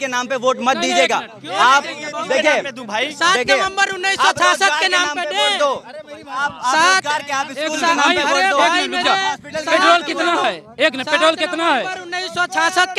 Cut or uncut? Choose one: uncut